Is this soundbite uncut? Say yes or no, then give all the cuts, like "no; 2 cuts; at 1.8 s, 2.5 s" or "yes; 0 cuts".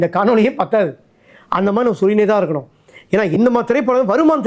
yes; 0 cuts